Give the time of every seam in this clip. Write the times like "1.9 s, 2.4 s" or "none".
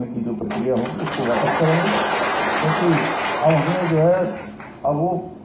none